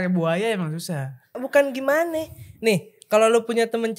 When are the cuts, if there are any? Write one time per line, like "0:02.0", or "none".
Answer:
0:01.4